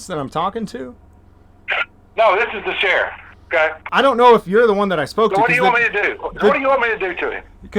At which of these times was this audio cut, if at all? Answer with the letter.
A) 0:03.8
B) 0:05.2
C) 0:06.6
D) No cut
A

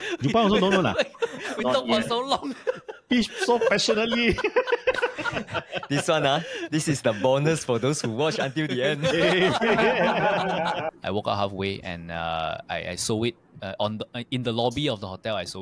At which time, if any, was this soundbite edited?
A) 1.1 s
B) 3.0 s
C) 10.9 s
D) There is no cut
C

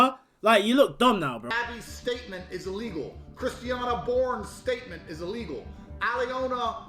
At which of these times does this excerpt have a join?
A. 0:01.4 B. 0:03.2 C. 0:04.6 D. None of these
A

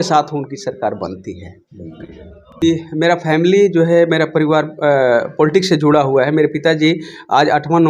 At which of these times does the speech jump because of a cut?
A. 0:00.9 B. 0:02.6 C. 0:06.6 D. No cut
B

